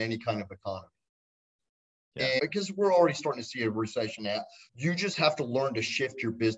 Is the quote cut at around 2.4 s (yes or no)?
yes